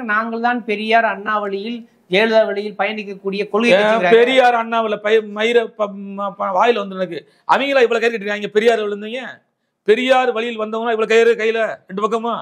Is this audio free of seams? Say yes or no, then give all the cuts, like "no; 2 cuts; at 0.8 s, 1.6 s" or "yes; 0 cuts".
yes; 0 cuts